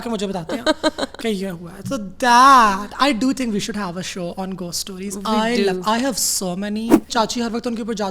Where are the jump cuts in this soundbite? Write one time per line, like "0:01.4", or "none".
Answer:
0:07.1